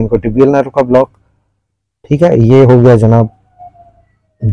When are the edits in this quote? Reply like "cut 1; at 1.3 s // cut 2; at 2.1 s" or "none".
none